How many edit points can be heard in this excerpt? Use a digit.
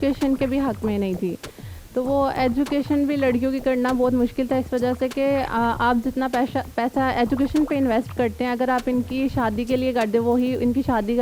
0